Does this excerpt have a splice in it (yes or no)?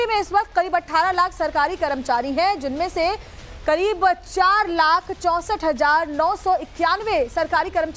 yes